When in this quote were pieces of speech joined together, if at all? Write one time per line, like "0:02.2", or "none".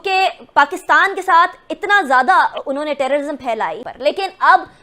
0:03.8